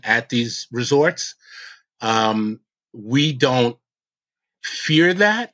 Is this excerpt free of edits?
yes; 0 cuts

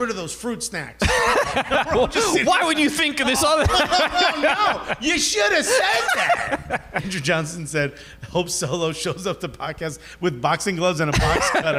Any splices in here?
yes; 1 cut; at 7.1 s

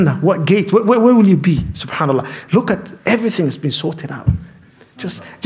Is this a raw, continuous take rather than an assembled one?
yes; 0 cuts

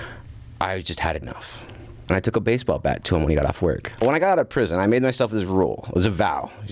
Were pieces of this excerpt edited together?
yes; 2 cuts; at 1.9 s, 4.0 s

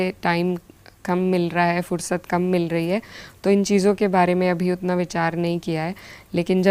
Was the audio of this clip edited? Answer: no; 0 cuts

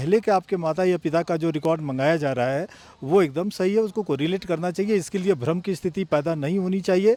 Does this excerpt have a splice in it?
no; 0 cuts

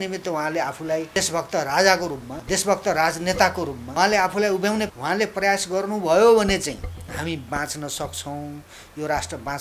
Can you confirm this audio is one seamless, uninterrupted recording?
no; 5 cuts; at 1.1 s, 2.3 s, 3.8 s, 4.9 s, 6.9 s

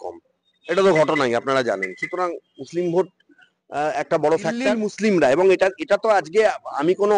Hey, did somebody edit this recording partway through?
yes; 1 cut; at 4.8 s

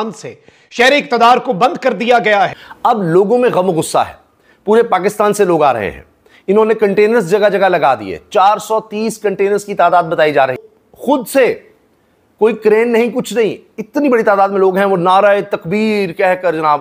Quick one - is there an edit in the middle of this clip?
yes; 2 cuts; at 2.7 s, 10.6 s

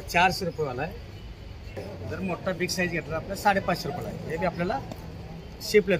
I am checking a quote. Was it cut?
yes; 1 cut; at 1.8 s

